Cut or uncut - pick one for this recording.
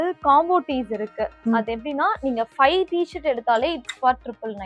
uncut